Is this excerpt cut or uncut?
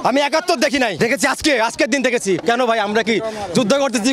cut